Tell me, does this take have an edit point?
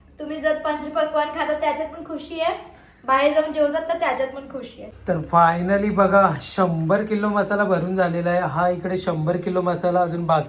yes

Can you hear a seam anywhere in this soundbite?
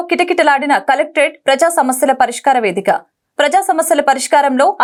no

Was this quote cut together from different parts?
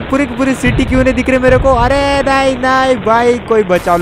no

